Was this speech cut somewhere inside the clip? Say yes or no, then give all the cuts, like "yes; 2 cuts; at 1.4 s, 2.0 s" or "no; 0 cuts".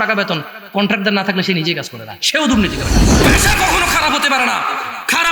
yes; 1 cut; at 3.2 s